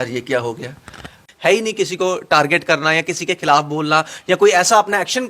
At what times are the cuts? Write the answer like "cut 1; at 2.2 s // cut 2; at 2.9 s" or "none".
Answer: cut 1; at 1.2 s